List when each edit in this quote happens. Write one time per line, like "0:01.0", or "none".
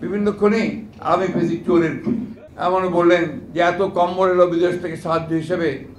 0:02.3